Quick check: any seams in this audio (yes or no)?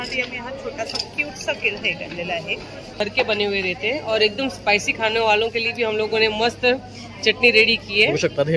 yes